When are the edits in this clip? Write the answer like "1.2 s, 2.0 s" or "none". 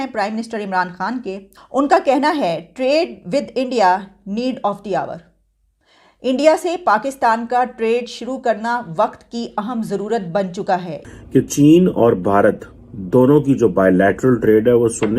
1.5 s, 11.0 s

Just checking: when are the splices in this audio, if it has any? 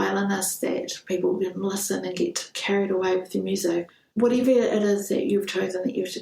3.9 s

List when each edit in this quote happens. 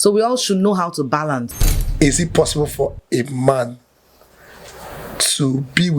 1.5 s

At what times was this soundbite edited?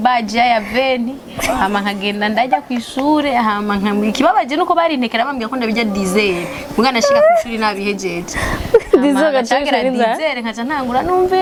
none

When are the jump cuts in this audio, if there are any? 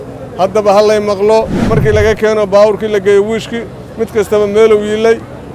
1.6 s

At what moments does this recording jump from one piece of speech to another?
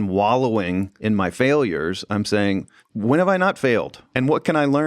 0.9 s, 4.1 s

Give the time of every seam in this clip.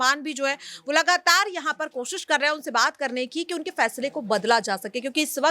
none

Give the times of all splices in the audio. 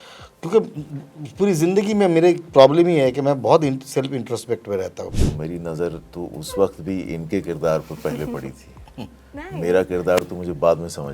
5.1 s

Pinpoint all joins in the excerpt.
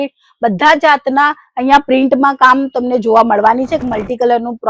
3.8 s

